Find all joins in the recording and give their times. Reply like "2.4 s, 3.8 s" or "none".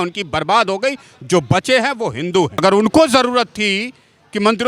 2.6 s